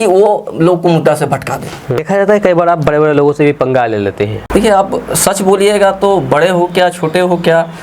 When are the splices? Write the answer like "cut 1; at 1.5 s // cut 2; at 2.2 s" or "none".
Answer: cut 1; at 2.0 s // cut 2; at 4.4 s